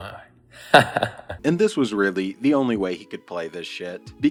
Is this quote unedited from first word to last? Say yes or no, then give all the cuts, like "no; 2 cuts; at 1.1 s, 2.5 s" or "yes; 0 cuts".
yes; 0 cuts